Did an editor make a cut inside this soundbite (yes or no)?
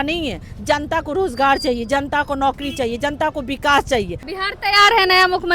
yes